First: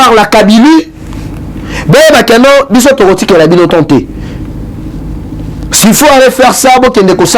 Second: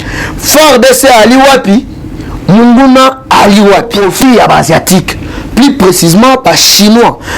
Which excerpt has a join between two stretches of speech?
second; 1 cut; at 3.9 s

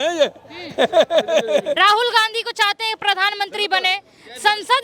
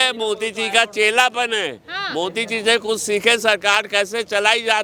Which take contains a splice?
first; 1 cut; at 1.8 s

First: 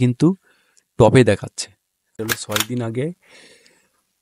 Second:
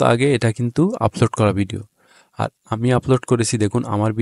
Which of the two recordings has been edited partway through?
first; 1 cut; at 2.1 s

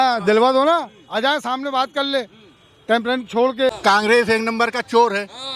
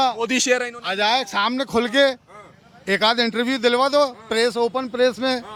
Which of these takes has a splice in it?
first; 1 cut; at 3.8 s

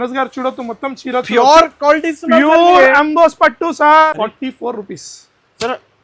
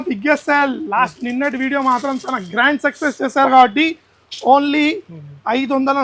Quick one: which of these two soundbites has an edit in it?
first; 1 cut; at 4.1 s

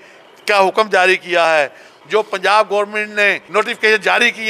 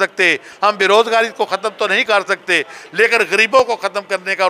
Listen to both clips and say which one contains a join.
first; 2 cuts; at 1.9 s, 3.4 s

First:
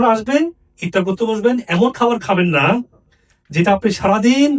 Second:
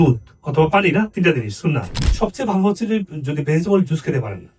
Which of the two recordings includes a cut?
second; 1 cut; at 2.0 s

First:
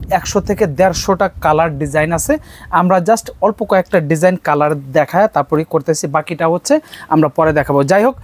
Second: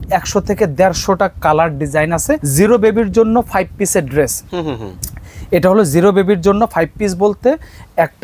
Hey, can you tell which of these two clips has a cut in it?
second; 1 cut; at 2.5 s

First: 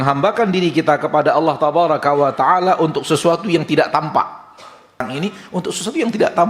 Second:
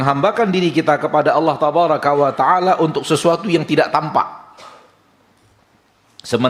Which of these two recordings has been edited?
first; 1 cut; at 5.0 s

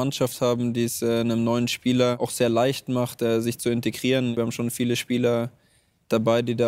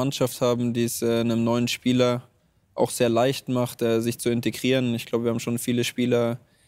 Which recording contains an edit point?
first; 2 cuts; at 2.2 s, 4.4 s

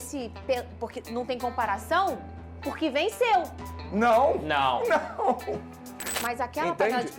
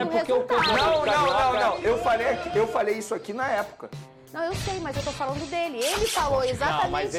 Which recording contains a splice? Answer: first; 1 cut; at 6.1 s

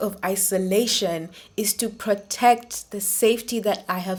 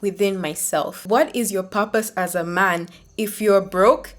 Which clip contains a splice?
second; 1 cut; at 1.0 s

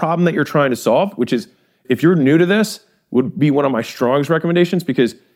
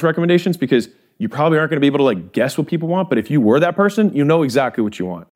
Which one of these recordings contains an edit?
first; 1 cut; at 1.8 s

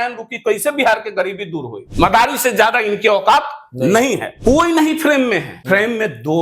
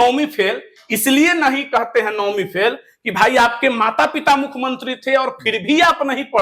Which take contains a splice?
first; 3 cuts; at 1.8 s, 4.3 s, 5.5 s

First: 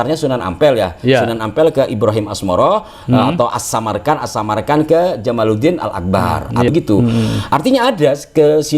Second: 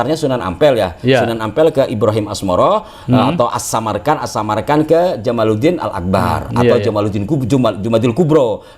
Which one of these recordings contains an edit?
first; 1 cut; at 6.7 s

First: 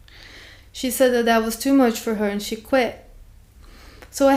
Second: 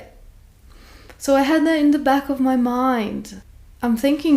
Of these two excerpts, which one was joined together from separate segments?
second; 1 cut; at 3.3 s

